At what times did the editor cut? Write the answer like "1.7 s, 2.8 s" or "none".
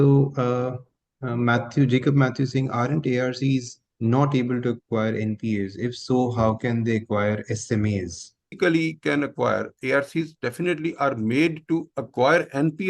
8.5 s